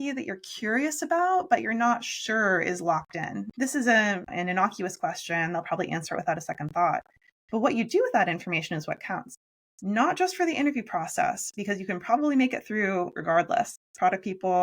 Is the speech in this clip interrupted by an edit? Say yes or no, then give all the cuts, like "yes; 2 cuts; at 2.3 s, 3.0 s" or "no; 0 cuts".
yes; 1 cut; at 3.5 s